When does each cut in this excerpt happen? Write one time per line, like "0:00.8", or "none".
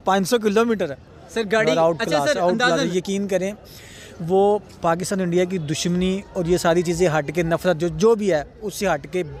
none